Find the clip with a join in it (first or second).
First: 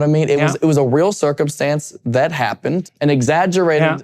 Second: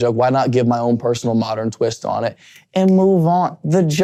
first